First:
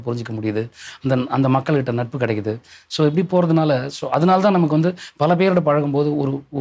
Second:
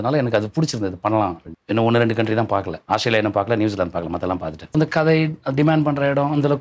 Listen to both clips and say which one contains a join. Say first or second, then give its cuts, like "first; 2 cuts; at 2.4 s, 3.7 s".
second; 3 cuts; at 1.5 s, 2.8 s, 4.7 s